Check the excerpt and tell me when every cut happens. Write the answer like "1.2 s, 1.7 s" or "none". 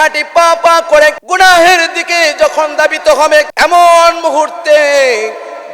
1.2 s, 3.5 s